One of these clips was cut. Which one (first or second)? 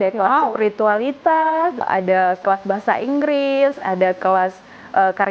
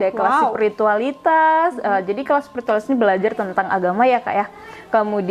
first